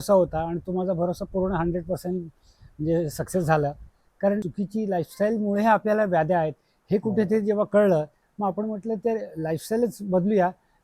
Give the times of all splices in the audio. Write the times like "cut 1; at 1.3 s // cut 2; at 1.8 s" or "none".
cut 1; at 4.5 s